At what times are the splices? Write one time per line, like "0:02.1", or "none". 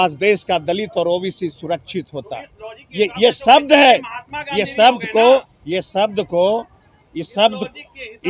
none

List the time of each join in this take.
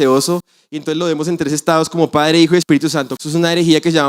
0:03.1

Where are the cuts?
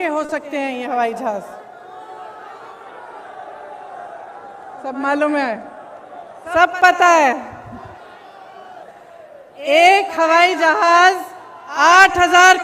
none

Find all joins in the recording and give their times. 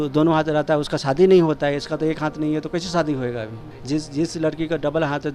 0:03.7

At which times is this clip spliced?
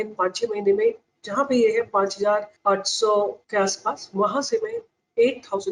0:02.5
0:03.4

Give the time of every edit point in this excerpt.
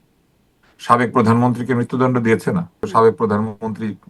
0:02.8

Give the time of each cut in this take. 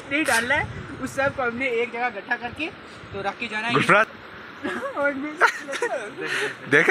0:04.1

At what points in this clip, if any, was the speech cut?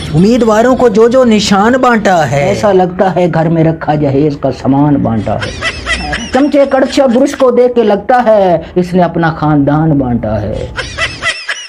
none

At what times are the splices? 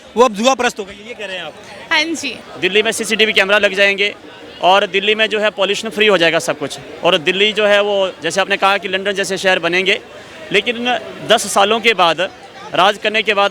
0:02.4

